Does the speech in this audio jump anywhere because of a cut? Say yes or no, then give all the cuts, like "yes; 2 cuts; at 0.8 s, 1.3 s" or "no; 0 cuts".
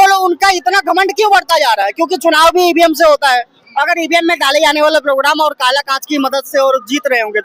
no; 0 cuts